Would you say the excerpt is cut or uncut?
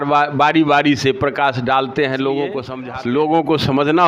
cut